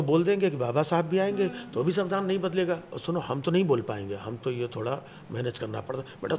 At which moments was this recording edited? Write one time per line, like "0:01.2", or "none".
none